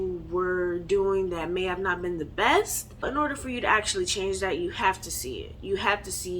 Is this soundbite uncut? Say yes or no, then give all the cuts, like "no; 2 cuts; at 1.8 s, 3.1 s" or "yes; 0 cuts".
no; 1 cut; at 3.0 s